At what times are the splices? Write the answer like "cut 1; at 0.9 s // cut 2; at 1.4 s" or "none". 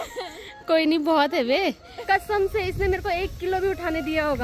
cut 1; at 1.9 s